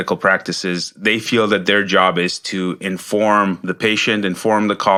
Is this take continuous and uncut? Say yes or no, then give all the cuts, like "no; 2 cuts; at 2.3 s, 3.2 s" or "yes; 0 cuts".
yes; 0 cuts